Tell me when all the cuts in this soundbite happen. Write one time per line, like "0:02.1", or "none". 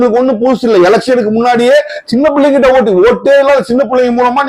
none